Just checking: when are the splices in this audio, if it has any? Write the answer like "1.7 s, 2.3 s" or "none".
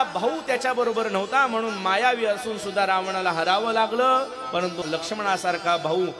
4.8 s